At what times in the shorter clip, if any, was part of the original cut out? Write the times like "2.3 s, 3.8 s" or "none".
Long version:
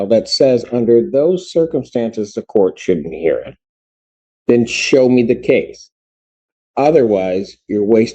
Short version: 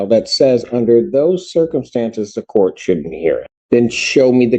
3.5 s